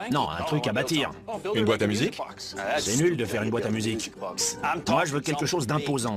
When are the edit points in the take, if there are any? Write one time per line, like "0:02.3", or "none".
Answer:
none